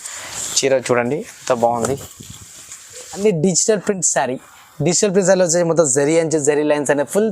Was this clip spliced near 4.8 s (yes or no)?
no